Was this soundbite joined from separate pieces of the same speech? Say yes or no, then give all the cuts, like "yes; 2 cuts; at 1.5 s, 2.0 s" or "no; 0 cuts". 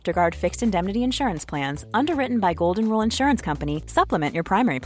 no; 0 cuts